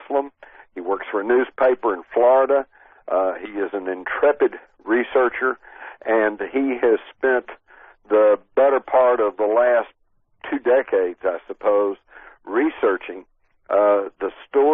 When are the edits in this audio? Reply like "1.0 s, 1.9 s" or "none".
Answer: 10.9 s